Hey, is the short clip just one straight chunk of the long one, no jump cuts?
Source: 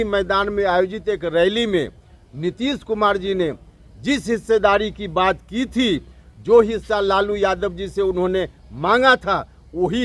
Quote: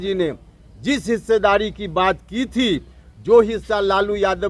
yes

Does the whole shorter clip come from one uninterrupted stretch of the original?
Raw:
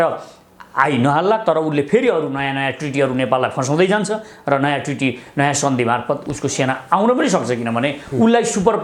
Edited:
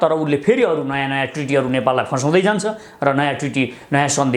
yes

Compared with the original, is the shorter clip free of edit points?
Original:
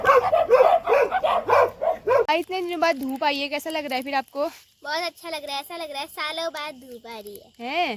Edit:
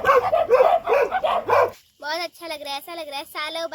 no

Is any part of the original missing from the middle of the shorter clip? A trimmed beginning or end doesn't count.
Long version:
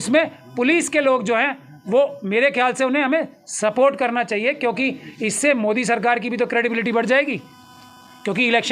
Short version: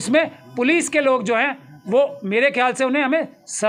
no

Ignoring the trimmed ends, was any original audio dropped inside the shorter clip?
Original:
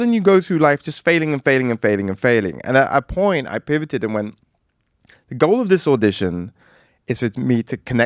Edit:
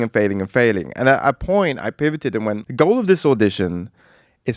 yes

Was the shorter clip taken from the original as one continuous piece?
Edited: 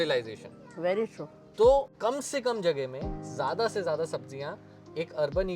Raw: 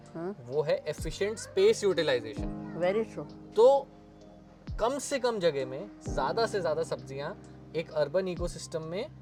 no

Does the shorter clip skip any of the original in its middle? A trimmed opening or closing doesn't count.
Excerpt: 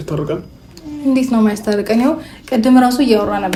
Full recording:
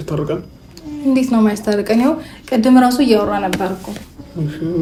no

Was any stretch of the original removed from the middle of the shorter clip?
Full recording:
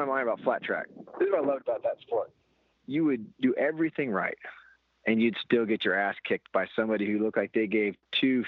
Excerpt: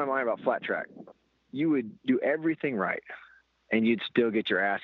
yes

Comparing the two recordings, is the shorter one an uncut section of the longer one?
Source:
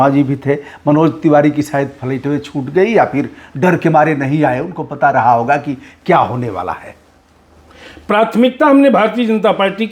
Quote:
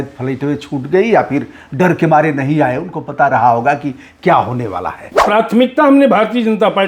no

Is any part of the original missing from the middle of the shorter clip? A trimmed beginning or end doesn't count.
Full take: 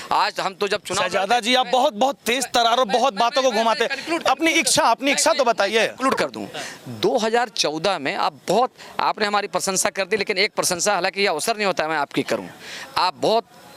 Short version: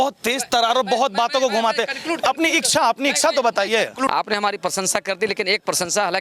yes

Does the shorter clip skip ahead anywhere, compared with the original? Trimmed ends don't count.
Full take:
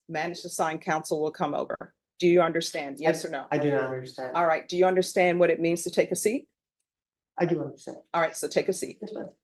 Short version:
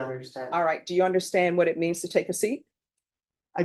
no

